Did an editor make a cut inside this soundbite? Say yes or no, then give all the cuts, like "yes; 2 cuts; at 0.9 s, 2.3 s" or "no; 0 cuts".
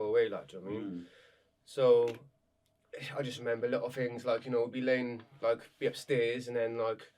no; 0 cuts